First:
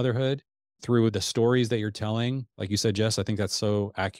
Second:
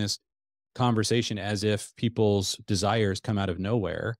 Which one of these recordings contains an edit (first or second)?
first